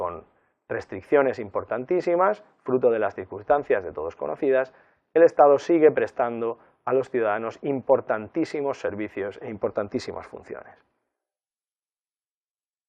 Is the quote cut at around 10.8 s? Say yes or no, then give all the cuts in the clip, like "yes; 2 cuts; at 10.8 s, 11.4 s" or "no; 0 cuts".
no; 1 cut; at 6.3 s